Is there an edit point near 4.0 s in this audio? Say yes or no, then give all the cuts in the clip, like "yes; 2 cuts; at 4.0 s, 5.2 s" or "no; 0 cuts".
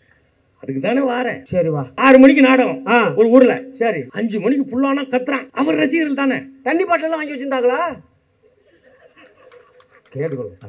yes; 3 cuts; at 1.9 s, 4.0 s, 5.5 s